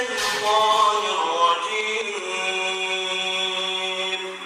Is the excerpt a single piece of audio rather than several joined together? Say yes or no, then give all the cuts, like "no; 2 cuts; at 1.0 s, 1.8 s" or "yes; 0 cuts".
yes; 0 cuts